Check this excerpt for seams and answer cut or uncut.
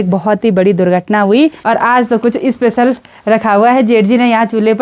cut